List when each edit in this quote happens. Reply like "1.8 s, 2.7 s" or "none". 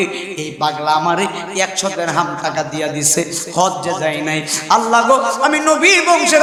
none